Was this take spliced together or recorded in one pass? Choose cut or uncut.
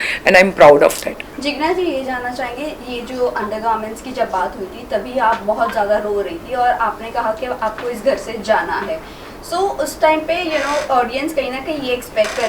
uncut